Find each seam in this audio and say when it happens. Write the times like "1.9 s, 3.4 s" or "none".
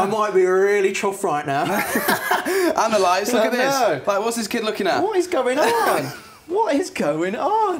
none